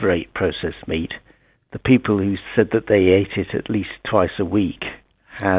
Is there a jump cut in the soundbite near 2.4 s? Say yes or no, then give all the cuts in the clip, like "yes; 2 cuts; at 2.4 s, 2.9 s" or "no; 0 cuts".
yes; 1 cut; at 2.4 s